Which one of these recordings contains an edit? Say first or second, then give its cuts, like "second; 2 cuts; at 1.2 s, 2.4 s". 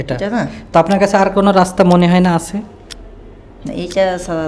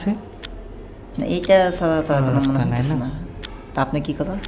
second; 1 cut; at 3.5 s